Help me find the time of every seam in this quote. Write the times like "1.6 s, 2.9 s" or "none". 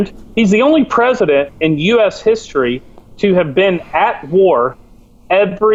none